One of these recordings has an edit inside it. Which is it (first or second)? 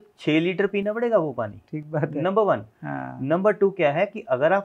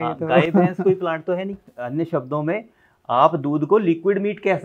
second